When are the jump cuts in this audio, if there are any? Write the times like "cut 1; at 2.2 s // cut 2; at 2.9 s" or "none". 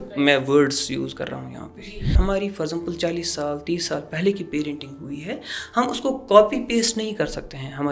cut 1; at 2.1 s